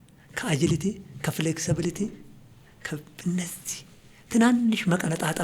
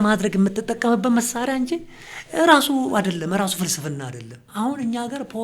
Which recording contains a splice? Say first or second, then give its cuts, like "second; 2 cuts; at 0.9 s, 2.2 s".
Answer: second; 1 cut; at 4.4 s